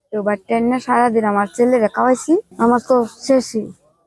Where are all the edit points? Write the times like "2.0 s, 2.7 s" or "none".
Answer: 2.5 s